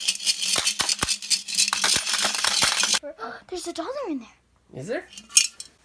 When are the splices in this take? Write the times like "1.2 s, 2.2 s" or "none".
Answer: 3.0 s